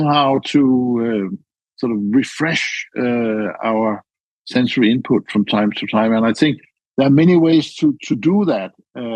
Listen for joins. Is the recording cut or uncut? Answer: uncut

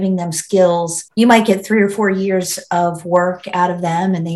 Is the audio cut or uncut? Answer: cut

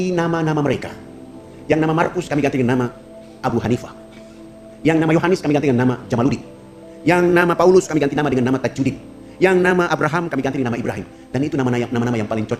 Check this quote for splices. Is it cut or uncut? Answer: uncut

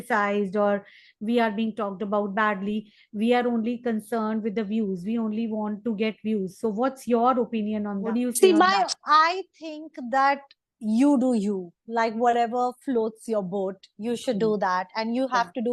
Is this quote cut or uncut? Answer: cut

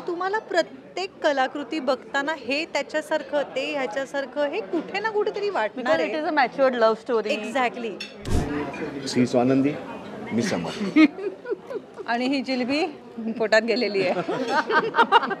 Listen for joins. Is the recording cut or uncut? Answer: cut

